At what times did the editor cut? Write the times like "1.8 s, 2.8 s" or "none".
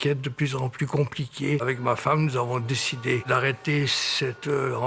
1.6 s, 3.2 s